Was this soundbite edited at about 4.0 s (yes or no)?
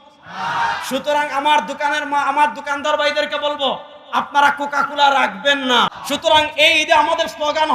no